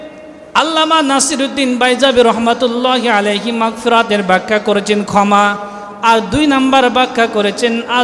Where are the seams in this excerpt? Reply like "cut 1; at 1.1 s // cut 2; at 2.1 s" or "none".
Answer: none